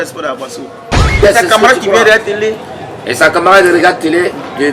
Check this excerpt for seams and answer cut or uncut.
cut